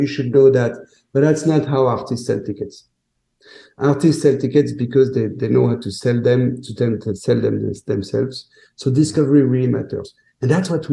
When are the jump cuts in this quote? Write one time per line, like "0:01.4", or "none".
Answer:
none